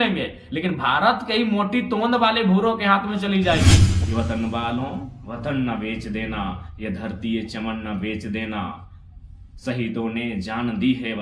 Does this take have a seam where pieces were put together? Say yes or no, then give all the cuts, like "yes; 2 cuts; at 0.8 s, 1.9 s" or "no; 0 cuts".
yes; 1 cut; at 3.9 s